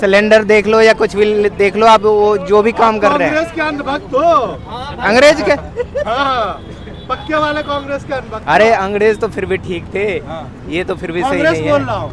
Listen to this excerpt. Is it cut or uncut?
uncut